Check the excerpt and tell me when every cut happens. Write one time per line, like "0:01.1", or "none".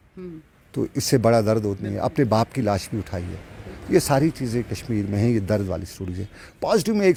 none